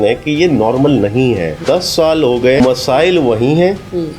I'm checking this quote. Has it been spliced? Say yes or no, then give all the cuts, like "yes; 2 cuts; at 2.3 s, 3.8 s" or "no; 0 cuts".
yes; 2 cuts; at 1.6 s, 2.6 s